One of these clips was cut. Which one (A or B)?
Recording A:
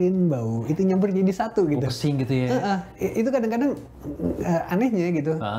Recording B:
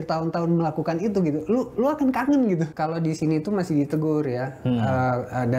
B